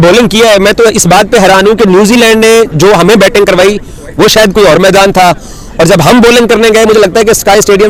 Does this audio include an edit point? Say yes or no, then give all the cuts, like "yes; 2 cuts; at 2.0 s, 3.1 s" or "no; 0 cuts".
no; 0 cuts